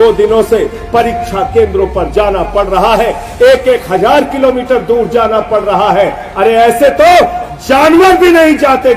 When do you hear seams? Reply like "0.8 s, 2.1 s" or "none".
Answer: none